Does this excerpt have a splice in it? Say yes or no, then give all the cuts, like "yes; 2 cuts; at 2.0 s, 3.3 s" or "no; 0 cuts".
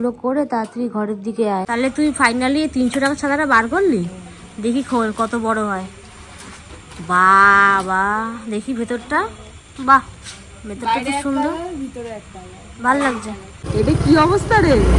yes; 2 cuts; at 1.7 s, 13.7 s